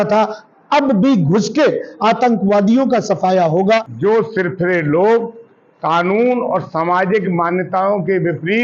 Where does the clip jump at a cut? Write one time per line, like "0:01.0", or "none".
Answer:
0:03.9